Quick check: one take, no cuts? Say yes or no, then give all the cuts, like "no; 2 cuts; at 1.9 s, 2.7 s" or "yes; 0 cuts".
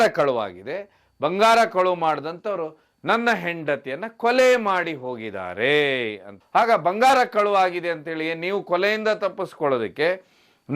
yes; 0 cuts